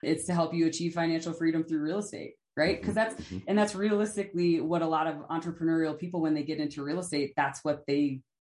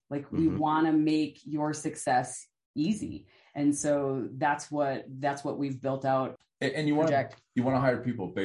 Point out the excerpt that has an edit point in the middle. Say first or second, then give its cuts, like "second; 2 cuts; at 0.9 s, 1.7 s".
second; 1 cut; at 6.3 s